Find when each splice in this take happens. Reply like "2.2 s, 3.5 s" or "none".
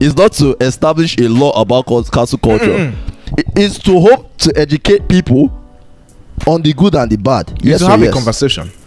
none